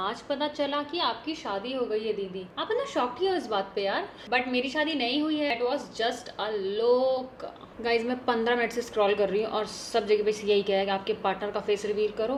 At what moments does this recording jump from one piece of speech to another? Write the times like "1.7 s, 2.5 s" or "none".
none